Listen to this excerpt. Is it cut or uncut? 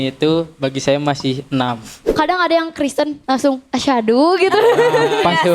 cut